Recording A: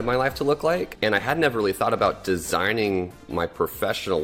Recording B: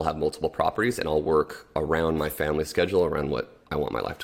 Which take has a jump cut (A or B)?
A